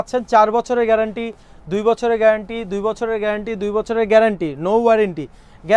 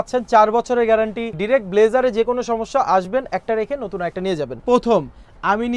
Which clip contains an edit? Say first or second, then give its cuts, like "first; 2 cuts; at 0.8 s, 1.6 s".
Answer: second; 2 cuts; at 1.3 s, 4.6 s